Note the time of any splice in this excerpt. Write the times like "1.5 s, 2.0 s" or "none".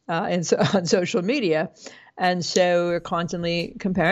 none